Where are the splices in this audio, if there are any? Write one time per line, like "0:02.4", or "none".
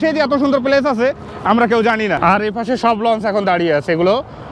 0:02.2